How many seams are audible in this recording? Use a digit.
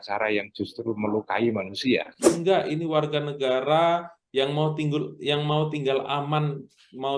1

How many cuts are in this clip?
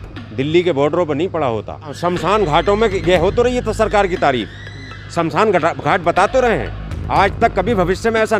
1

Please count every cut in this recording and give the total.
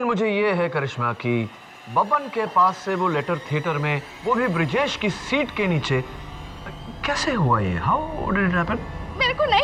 0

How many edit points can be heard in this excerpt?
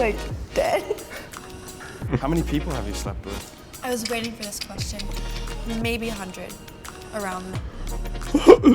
1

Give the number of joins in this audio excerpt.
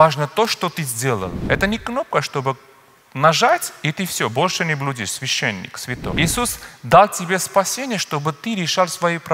2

